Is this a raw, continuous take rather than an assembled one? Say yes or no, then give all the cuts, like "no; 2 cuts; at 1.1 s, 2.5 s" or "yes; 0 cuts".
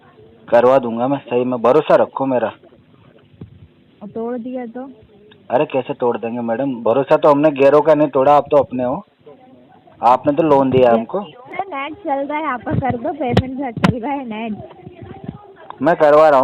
no; 1 cut; at 11.4 s